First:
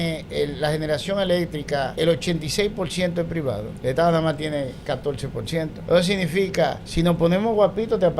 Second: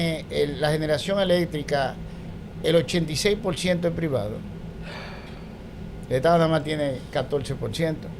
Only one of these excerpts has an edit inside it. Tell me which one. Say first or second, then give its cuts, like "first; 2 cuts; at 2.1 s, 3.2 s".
first; 4 cuts; at 1.9 s, 3.7 s, 5.8 s, 6.8 s